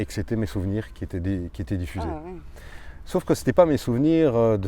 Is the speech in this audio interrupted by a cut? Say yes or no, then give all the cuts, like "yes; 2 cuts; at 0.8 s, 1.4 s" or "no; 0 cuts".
no; 0 cuts